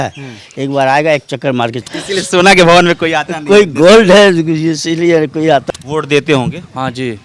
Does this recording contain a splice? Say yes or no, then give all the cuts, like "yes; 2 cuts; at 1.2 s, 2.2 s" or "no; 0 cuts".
yes; 2 cuts; at 1.8 s, 5.6 s